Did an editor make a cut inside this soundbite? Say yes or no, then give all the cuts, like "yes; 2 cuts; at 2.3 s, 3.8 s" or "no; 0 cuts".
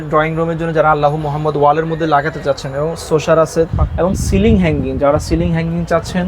yes; 1 cut; at 3.7 s